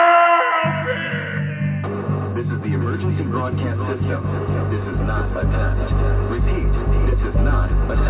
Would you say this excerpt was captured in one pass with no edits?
yes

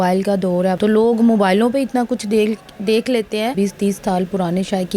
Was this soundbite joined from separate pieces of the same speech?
yes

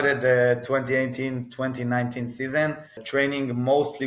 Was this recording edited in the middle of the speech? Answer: yes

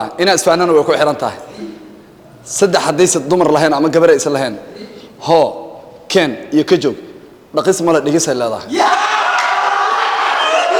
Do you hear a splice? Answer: no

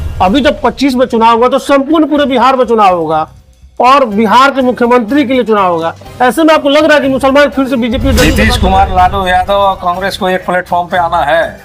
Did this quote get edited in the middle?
yes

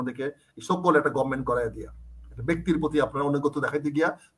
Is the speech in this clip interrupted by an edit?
no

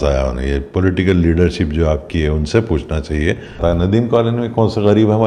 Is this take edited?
yes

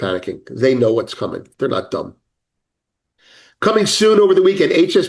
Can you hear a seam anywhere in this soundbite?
no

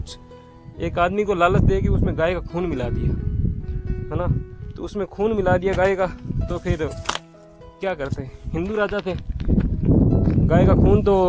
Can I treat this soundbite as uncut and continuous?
yes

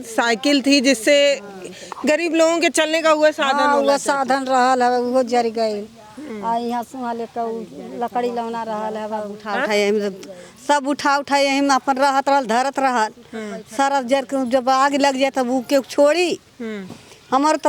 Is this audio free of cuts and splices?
yes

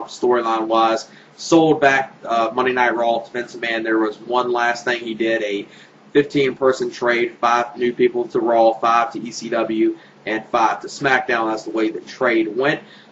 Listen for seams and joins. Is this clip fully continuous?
no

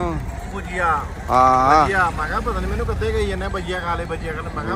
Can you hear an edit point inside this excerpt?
no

